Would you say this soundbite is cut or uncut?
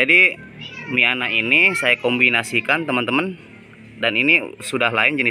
uncut